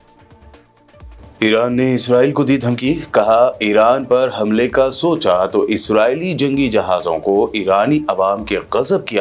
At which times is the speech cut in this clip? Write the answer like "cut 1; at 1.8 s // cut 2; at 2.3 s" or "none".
cut 1; at 0.9 s